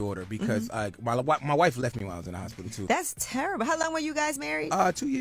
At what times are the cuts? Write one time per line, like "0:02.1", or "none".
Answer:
0:02.7